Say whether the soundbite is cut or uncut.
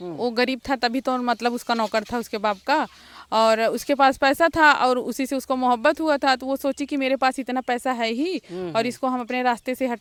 uncut